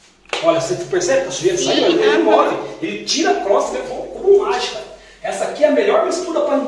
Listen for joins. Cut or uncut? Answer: uncut